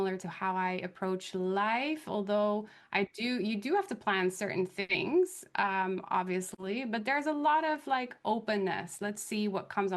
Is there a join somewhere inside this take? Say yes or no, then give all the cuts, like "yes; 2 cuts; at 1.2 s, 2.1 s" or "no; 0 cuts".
yes; 1 cut; at 6.5 s